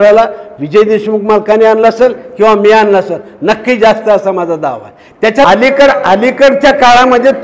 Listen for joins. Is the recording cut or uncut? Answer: cut